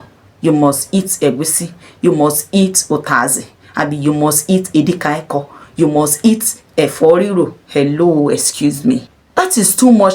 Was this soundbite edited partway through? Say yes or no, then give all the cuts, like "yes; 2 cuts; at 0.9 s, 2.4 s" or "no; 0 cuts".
yes; 1 cut; at 9.2 s